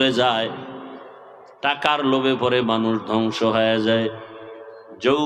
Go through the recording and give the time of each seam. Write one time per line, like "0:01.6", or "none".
none